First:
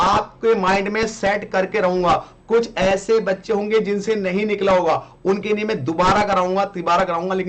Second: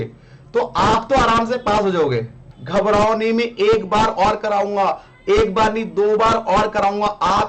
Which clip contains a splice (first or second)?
second